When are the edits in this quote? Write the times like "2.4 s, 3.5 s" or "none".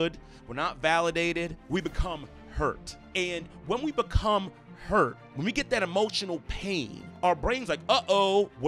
7.0 s